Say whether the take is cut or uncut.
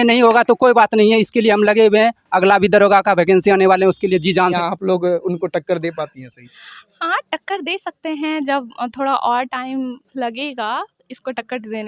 cut